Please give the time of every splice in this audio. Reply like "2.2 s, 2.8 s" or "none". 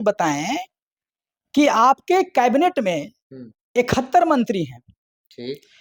none